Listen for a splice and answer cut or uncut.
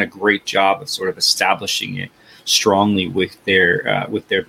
uncut